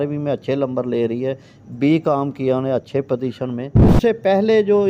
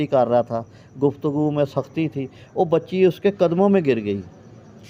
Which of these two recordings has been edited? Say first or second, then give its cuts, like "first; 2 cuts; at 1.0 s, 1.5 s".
first; 1 cut; at 3.8 s